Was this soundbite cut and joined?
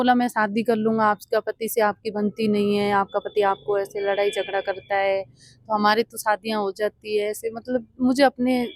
no; 0 cuts

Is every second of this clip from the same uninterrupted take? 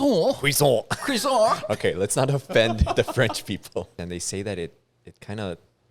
no; 1 cut; at 4.0 s

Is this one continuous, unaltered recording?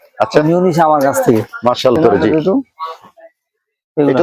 no; 1 cut; at 2.0 s

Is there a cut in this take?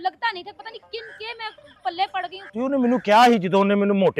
yes; 1 cut; at 2.4 s

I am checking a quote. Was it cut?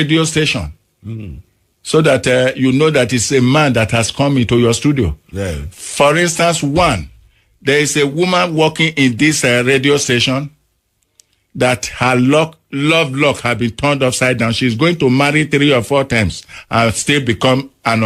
no; 0 cuts

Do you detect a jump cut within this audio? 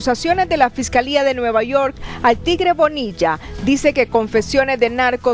no; 0 cuts

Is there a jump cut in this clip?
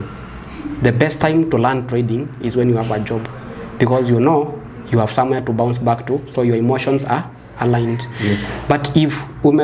no; 0 cuts

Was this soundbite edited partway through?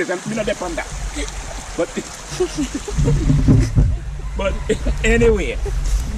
no; 0 cuts

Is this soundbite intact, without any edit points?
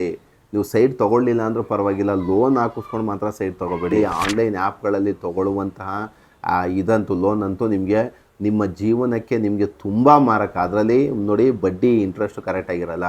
no; 1 cut; at 4.2 s

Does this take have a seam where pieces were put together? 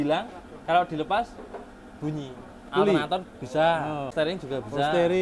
yes; 2 cuts; at 2.6 s, 4.1 s

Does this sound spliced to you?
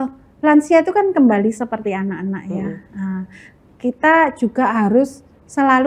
no; 0 cuts

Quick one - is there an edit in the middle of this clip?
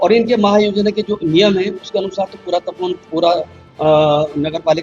no; 0 cuts

